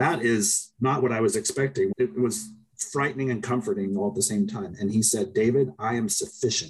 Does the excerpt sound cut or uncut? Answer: cut